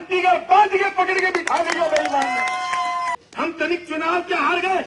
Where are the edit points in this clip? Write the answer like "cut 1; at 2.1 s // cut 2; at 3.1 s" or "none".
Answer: cut 1; at 3.2 s